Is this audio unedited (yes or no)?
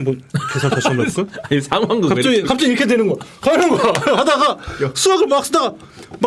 yes